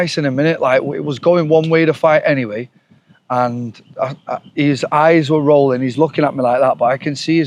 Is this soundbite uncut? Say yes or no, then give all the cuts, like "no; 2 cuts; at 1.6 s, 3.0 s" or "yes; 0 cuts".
yes; 0 cuts